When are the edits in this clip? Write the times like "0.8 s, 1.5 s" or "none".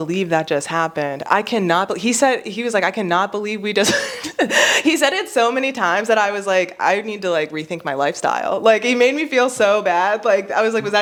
none